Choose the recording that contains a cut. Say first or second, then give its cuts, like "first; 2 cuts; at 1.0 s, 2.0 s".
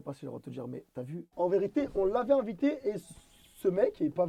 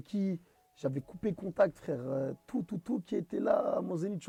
first; 1 cut; at 1.2 s